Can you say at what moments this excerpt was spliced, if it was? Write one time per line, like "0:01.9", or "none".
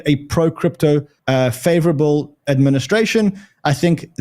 0:01.1